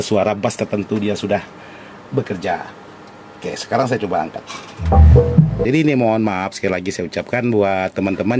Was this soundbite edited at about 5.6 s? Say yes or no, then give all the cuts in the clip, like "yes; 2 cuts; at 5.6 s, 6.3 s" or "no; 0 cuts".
yes; 1 cut; at 5.6 s